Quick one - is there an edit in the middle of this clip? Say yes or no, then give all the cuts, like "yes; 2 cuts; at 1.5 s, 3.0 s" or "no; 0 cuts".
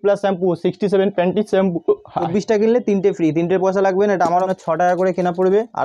yes; 2 cuts; at 2.3 s, 4.5 s